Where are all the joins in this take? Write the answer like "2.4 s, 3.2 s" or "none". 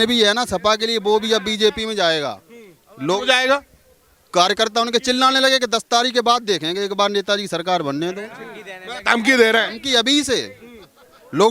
none